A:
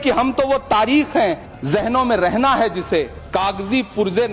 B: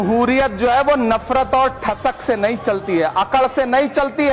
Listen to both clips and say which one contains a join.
A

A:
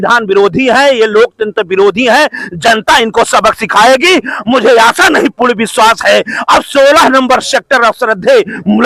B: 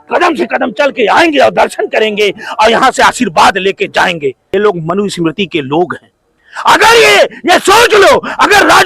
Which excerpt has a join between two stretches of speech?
B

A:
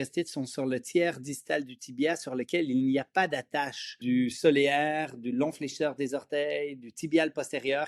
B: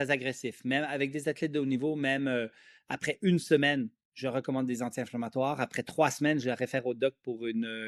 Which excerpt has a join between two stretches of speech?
A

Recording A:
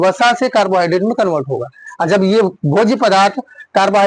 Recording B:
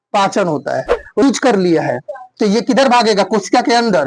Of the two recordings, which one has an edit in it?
B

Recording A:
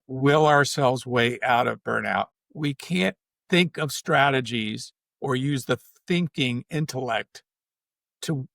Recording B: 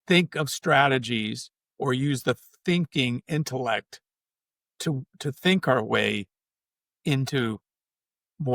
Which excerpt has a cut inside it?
A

